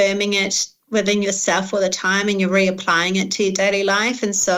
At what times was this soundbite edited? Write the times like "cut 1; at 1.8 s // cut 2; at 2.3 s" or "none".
none